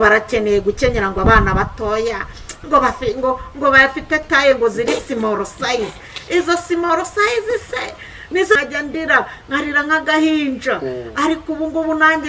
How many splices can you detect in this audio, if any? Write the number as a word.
one